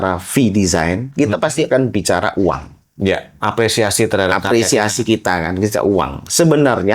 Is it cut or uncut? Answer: cut